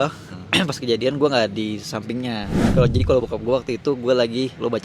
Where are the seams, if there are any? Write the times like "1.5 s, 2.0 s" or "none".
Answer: 2.6 s